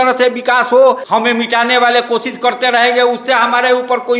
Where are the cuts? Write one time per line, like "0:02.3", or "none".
0:01.0